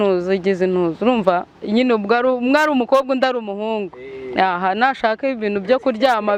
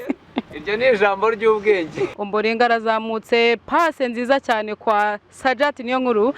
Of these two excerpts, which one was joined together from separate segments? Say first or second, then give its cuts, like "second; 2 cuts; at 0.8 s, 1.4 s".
second; 1 cut; at 2.1 s